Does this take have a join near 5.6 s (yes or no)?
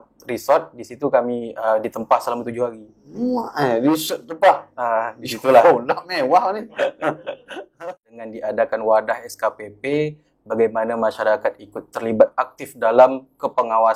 no